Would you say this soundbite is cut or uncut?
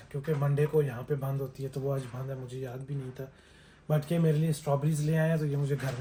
uncut